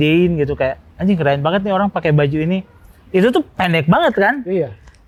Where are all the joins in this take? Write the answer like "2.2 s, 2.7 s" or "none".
none